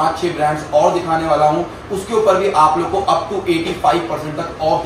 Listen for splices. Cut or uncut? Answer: uncut